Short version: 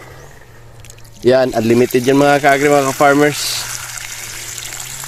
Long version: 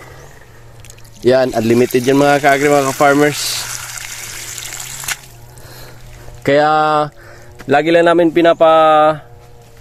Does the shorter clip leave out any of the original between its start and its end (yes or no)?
no